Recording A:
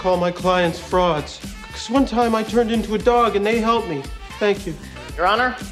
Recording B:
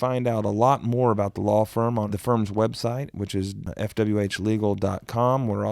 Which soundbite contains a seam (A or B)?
B